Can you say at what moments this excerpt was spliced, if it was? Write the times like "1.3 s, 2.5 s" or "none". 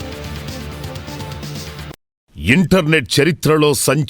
2.4 s